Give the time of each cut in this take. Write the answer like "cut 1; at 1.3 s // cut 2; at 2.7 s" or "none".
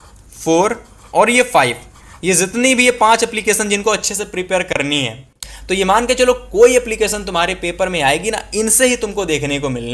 cut 1; at 5.4 s